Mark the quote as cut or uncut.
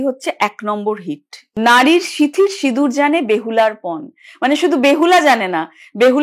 cut